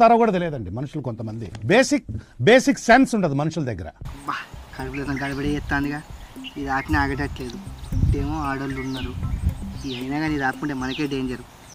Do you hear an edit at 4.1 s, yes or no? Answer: yes